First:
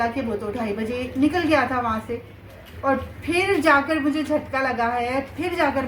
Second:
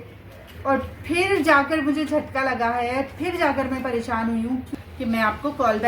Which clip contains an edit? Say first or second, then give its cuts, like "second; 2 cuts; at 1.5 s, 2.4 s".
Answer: second; 1 cut; at 4.7 s